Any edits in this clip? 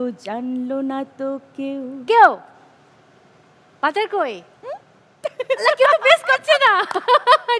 no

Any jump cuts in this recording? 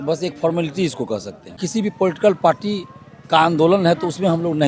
yes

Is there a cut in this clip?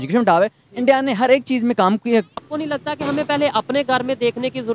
yes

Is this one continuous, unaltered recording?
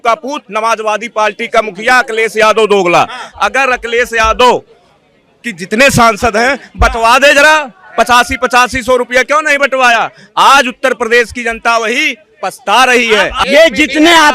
no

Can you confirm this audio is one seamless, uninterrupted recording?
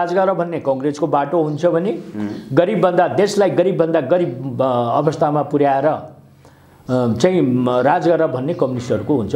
yes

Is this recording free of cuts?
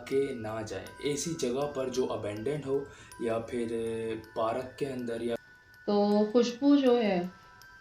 no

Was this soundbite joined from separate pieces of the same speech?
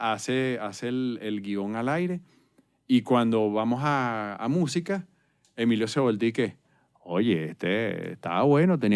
no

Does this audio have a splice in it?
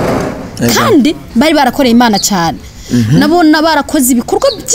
no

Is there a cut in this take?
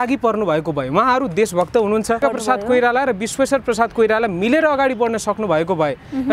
yes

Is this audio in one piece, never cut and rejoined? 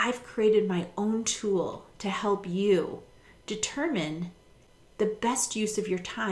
yes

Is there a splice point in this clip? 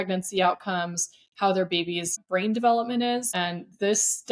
yes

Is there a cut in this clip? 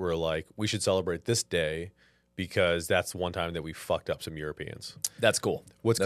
no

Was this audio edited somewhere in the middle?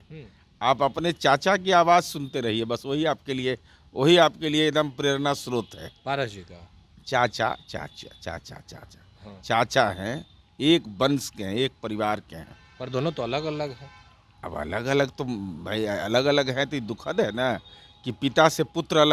no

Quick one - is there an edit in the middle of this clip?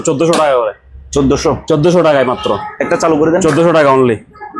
no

